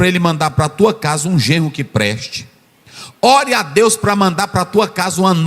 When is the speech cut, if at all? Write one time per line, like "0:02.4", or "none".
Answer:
none